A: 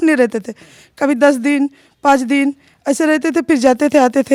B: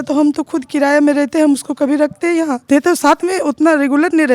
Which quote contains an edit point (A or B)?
B